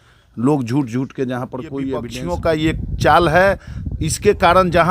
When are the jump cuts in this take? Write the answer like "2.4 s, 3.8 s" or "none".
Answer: 2.1 s